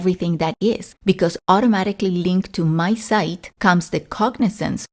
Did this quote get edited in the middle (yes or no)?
yes